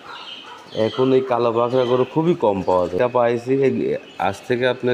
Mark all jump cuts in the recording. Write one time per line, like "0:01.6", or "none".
0:02.9